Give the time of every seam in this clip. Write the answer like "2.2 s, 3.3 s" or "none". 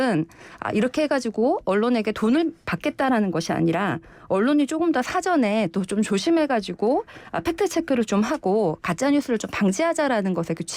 none